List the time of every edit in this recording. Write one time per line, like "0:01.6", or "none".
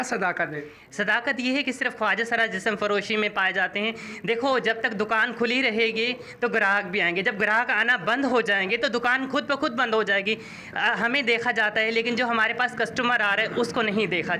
none